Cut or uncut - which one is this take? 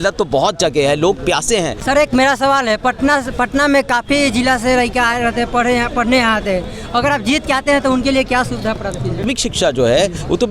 cut